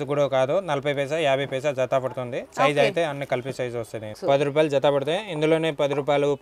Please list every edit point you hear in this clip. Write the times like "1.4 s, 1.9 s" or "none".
4.2 s